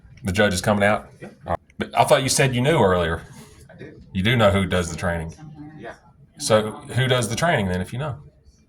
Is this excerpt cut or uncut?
cut